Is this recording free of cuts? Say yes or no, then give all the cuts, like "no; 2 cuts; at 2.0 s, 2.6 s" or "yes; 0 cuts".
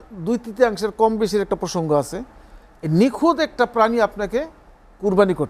yes; 0 cuts